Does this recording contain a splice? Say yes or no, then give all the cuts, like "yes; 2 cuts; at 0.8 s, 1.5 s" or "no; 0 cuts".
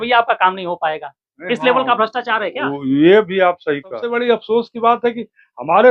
yes; 1 cut; at 4.0 s